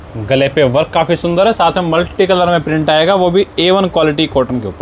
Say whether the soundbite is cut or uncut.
uncut